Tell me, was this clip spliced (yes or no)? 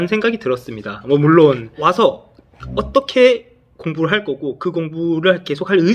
yes